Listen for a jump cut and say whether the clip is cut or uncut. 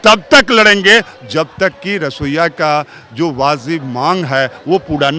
uncut